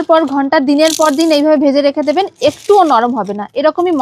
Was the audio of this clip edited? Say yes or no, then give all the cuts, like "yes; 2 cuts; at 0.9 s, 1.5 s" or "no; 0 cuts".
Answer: no; 0 cuts